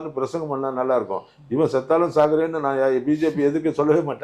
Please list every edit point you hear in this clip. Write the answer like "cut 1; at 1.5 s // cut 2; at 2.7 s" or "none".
none